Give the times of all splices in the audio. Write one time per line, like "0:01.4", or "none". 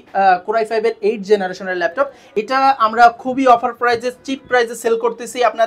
0:02.2